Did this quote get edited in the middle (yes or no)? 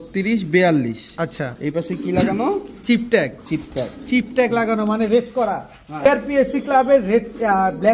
no